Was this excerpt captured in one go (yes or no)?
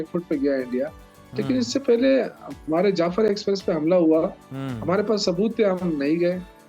yes